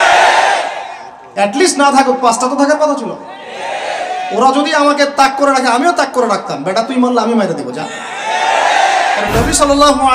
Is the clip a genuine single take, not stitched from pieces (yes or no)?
no